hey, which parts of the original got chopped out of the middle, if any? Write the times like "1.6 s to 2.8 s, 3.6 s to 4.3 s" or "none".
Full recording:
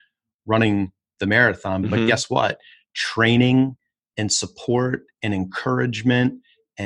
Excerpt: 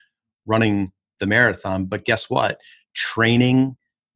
none